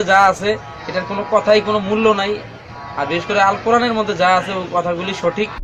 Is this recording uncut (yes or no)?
yes